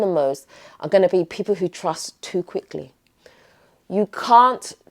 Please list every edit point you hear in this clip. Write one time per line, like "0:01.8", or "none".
none